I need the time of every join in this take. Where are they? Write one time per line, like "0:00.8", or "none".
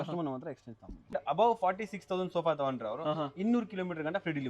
0:01.1